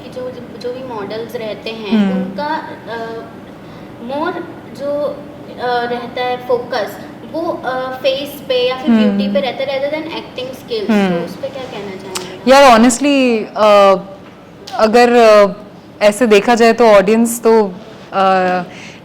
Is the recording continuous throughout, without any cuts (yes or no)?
yes